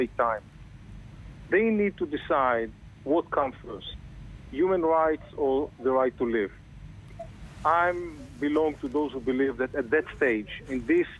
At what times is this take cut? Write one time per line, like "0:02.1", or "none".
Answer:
0:02.3